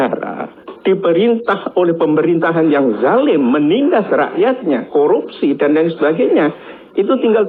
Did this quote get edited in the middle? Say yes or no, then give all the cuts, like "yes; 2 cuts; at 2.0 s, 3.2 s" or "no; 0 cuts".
no; 0 cuts